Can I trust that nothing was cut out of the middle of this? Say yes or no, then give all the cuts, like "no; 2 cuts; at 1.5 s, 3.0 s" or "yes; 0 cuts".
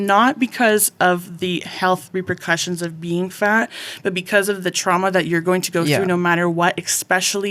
yes; 0 cuts